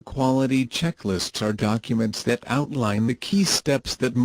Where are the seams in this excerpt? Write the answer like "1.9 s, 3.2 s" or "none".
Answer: 1.3 s

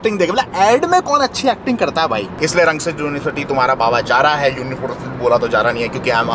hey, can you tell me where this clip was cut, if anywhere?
none

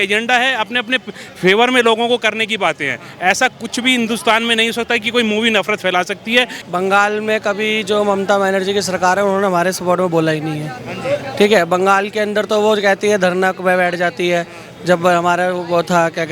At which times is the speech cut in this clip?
6.6 s

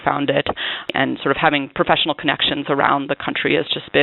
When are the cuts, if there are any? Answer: 0.9 s

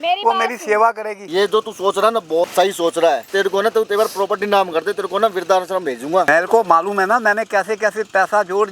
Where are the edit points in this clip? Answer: 1.1 s, 2.5 s, 3.3 s, 6.3 s

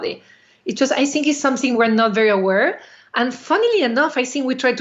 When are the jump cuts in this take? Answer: none

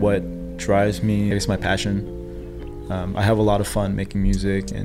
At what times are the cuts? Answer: 1.3 s

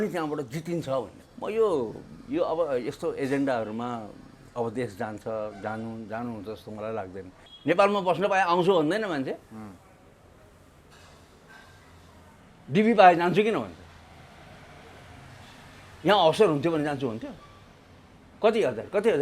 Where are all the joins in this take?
1.2 s, 7.4 s

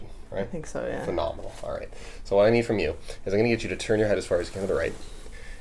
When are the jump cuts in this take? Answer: none

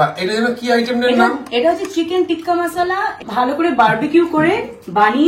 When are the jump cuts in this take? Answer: none

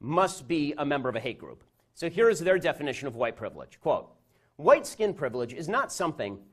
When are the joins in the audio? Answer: 5.2 s

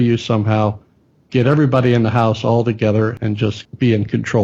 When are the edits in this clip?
3.2 s

